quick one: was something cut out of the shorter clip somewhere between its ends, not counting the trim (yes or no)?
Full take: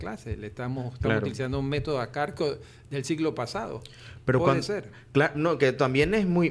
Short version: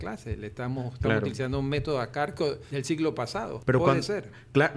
yes